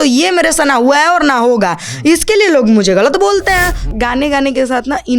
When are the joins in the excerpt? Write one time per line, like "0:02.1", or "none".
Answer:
0:03.9